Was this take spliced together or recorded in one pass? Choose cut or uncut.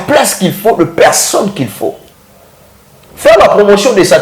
cut